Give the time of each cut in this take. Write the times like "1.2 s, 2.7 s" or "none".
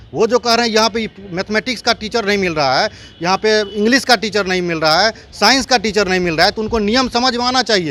none